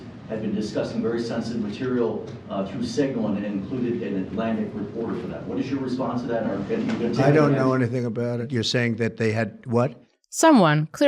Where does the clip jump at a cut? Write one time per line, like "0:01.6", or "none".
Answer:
0:08.4